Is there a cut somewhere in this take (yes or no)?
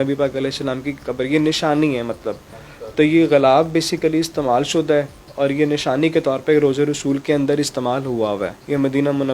no